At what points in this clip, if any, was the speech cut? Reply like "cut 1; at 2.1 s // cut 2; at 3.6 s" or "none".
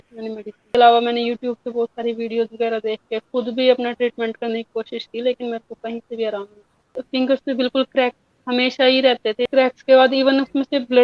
cut 1; at 0.8 s // cut 2; at 7.0 s // cut 3; at 9.4 s

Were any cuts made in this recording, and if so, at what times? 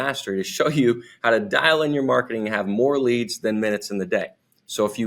none

